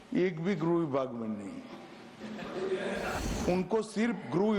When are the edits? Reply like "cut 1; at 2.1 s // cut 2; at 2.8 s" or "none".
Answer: cut 1; at 3.2 s